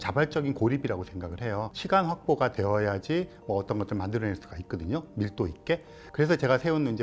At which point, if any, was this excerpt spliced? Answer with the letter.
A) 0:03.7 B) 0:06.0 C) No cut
B